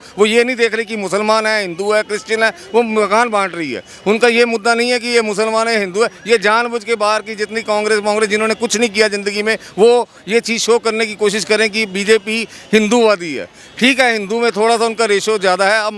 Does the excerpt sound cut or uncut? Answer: uncut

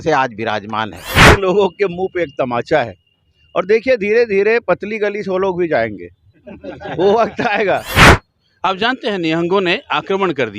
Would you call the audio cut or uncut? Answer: cut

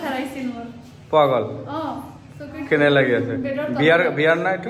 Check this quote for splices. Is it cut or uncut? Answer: uncut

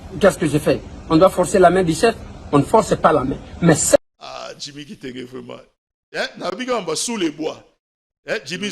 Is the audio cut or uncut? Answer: cut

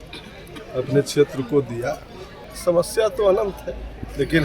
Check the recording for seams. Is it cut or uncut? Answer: cut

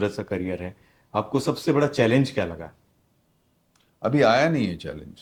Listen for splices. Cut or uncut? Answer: uncut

